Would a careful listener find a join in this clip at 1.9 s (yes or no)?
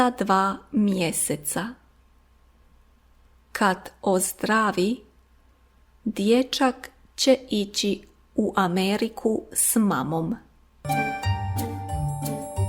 yes